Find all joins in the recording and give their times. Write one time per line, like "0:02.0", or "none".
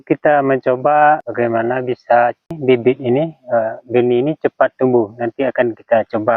0:01.2
0:02.5

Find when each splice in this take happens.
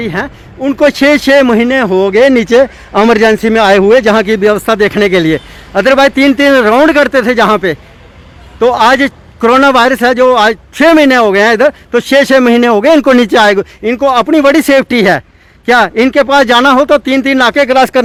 none

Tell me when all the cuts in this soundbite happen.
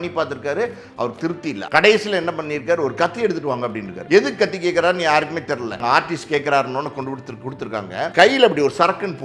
0:01.6
0:03.9
0:05.8
0:08.1

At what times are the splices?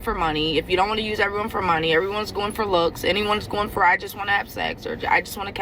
none

